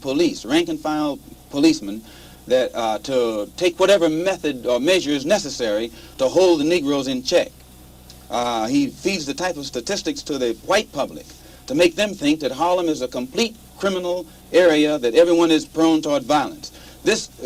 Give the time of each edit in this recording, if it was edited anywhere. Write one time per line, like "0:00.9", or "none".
none